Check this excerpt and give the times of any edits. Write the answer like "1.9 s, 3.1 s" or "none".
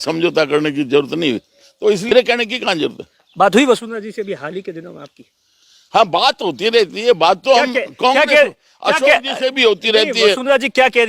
2.1 s